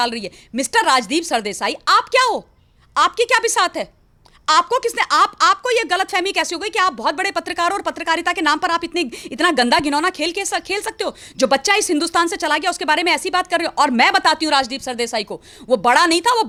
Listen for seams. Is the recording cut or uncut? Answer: uncut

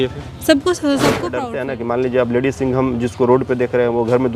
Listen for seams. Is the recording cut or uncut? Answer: cut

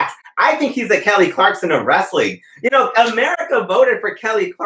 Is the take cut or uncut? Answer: uncut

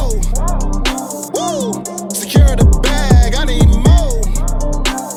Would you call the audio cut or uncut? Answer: uncut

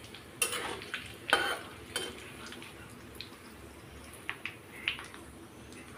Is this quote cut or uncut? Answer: uncut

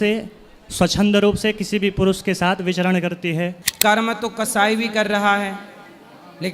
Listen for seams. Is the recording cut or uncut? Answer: cut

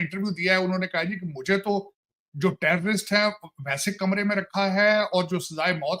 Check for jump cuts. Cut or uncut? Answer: uncut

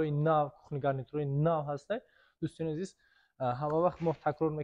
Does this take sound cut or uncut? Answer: uncut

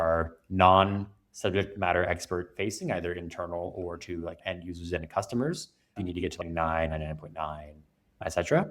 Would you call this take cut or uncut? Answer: cut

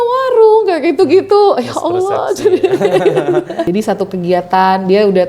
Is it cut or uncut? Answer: cut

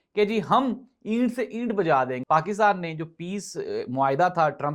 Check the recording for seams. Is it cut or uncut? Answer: cut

